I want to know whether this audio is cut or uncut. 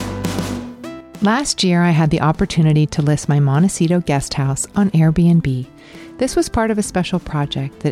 cut